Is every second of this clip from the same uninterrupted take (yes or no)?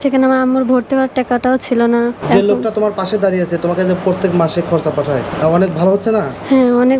no